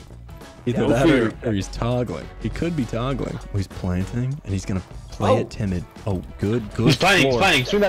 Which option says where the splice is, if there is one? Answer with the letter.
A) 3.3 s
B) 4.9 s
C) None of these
A